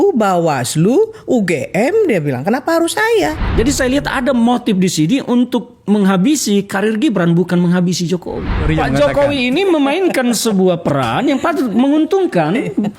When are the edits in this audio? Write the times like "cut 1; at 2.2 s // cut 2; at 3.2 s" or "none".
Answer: cut 1; at 3.4 s // cut 2; at 8.6 s